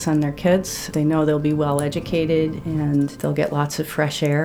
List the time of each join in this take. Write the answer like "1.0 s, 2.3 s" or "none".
0.9 s, 3.2 s